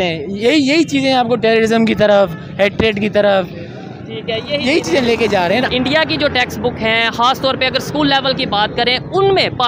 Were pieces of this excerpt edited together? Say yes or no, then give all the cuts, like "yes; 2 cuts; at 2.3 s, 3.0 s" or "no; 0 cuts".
yes; 1 cut; at 5.7 s